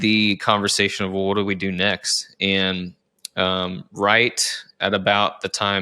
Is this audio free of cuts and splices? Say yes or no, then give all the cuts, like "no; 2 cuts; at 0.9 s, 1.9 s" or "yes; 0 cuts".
yes; 0 cuts